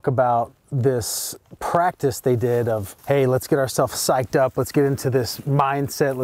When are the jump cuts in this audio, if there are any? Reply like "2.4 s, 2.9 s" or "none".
2.9 s